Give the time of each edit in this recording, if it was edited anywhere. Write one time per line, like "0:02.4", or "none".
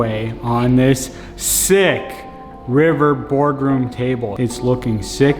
0:04.3